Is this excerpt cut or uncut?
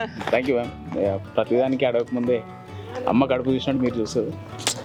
uncut